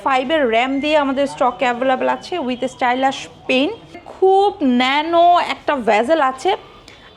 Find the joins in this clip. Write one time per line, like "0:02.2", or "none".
0:04.0